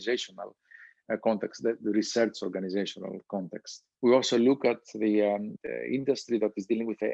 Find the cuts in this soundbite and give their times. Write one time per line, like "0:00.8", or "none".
0:03.9
0:05.5